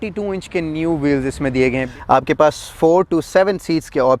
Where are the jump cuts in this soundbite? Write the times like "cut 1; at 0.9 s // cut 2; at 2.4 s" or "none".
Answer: cut 1; at 1.8 s